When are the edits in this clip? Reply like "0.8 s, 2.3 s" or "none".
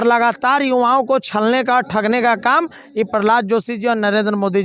none